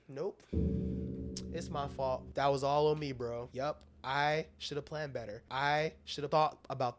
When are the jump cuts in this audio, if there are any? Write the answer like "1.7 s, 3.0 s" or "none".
2.3 s, 3.5 s, 5.8 s